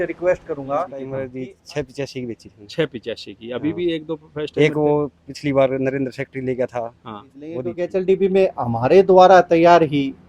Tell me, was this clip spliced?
yes; 2 cuts; at 1.2 s, 7.7 s

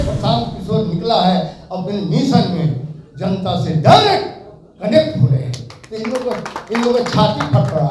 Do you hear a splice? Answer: no; 0 cuts

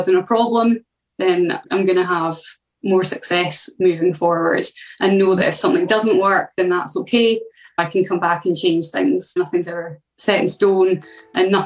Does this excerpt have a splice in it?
no; 0 cuts

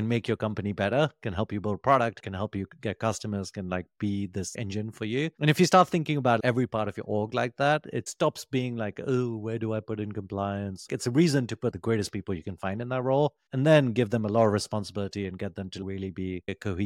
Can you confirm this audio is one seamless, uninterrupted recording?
no; 3 cuts; at 2.2 s, 8.0 s, 10.9 s

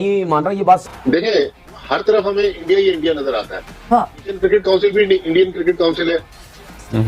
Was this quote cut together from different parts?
yes; 1 cut; at 0.9 s

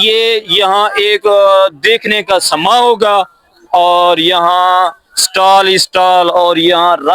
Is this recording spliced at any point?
no; 0 cuts

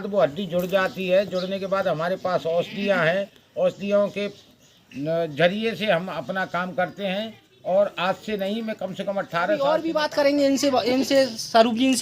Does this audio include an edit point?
yes; 1 cut; at 9.6 s

